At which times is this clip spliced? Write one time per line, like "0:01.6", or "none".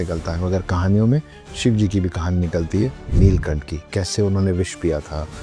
none

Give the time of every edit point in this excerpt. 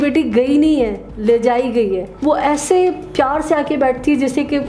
0:02.1

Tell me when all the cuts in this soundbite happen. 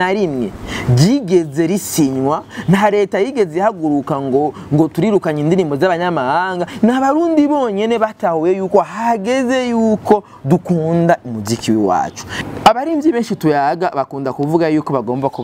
0:12.3

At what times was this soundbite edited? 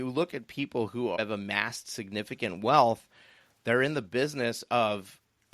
0:01.2

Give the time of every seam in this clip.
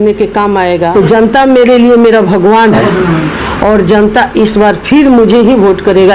0:00.9
0:02.8

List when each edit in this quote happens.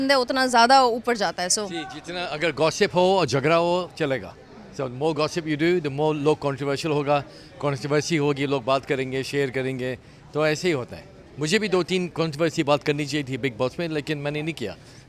none

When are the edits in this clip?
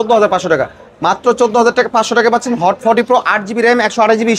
none

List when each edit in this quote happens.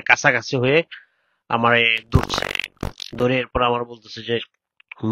none

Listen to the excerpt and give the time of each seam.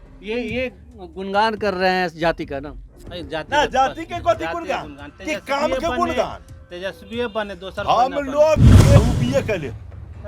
0:09.0

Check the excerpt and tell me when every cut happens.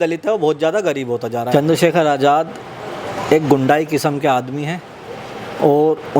0:01.5

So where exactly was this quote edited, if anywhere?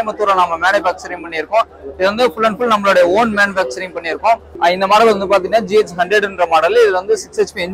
0:04.5

